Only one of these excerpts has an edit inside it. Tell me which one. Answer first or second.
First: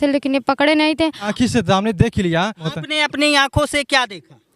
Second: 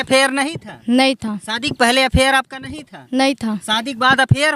first